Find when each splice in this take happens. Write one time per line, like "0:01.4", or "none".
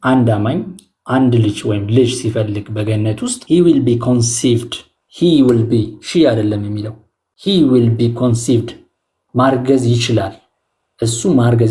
0:03.4